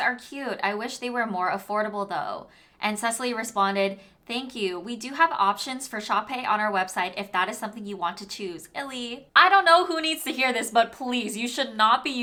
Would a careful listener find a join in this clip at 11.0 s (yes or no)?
no